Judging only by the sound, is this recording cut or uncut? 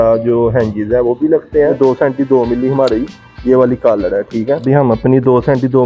cut